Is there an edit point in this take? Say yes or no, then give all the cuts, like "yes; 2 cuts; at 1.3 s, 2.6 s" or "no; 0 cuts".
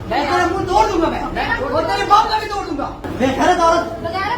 yes; 1 cut; at 3.0 s